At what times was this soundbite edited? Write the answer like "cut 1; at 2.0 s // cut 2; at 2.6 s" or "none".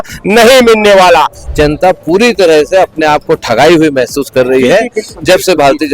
cut 1; at 1.5 s